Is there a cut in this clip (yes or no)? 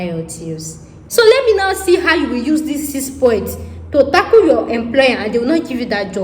yes